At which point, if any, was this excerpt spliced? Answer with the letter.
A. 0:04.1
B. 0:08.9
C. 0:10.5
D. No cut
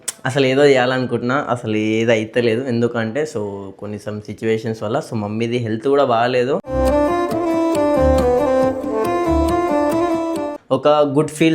C